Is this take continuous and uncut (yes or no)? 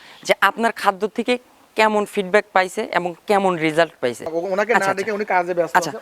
no